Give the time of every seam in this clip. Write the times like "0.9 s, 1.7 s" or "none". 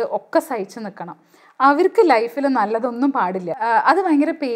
3.5 s